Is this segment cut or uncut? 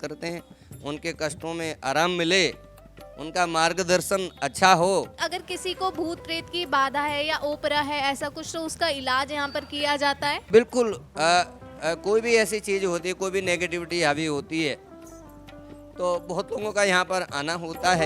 cut